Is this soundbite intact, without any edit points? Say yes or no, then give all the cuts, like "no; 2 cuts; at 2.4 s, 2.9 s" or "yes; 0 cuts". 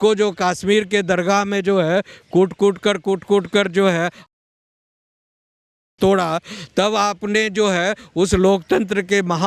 yes; 0 cuts